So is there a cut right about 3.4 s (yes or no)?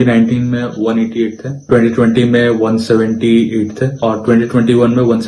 no